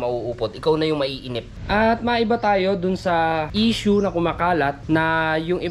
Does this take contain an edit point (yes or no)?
yes